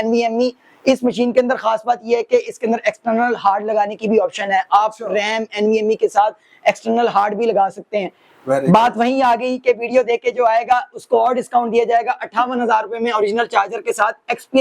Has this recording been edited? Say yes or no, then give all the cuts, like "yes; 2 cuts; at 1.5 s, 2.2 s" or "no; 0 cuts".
no; 0 cuts